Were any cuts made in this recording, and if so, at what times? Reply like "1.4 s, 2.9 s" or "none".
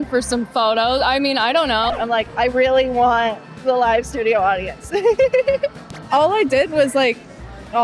1.9 s, 5.9 s